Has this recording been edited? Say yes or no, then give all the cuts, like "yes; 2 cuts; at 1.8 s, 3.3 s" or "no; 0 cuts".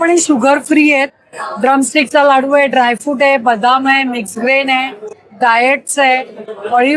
no; 0 cuts